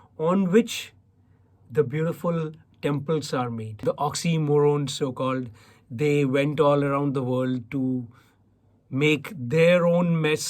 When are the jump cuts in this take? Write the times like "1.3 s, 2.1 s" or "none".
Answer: 3.8 s